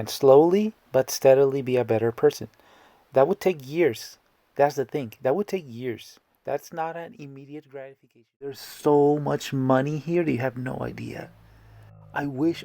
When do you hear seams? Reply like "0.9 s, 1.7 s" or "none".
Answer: 8.7 s